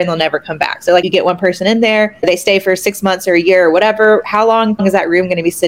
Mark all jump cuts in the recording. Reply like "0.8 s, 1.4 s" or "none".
1.1 s, 2.2 s, 4.8 s